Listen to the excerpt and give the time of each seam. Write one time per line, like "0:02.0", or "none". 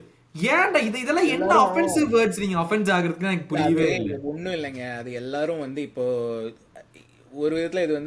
none